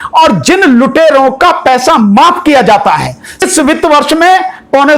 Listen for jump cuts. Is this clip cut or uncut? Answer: cut